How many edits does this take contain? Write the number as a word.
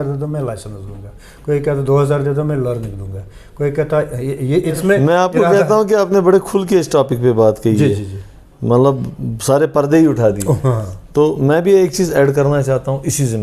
one